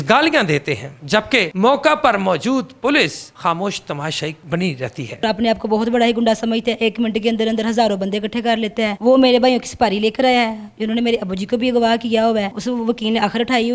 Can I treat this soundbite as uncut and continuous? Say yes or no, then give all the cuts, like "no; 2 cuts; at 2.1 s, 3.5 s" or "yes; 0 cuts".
no; 2 cuts; at 5.2 s, 12.5 s